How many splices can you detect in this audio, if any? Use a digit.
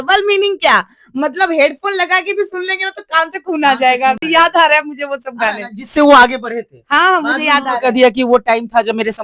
0